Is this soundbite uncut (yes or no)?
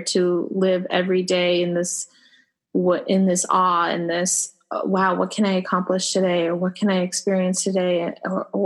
yes